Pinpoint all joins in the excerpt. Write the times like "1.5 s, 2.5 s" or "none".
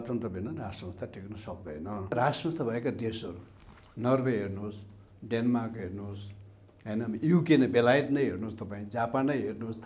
2.1 s